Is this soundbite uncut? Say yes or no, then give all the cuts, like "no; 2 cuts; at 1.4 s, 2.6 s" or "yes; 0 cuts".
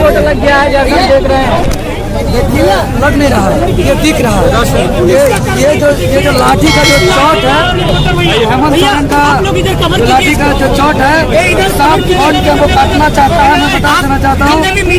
yes; 0 cuts